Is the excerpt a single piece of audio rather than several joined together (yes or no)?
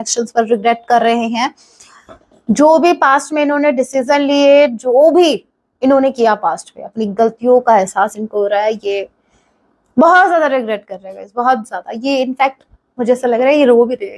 yes